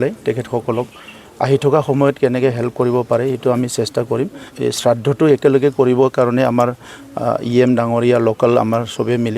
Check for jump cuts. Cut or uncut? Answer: cut